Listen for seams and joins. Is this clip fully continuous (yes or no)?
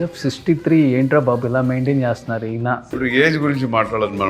no